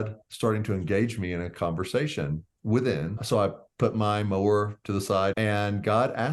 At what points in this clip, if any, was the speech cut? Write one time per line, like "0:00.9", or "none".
0:03.2
0:05.4